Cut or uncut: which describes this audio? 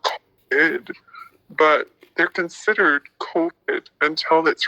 cut